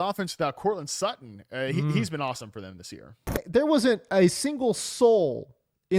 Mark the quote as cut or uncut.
cut